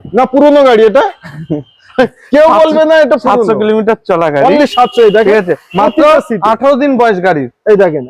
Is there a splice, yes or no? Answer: no